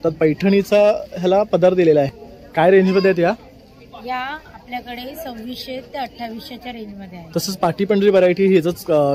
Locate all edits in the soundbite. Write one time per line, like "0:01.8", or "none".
0:02.1